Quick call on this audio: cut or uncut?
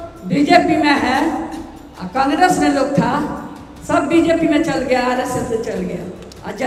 uncut